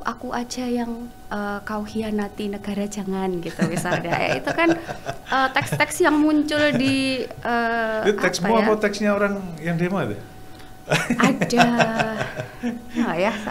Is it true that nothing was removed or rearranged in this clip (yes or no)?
yes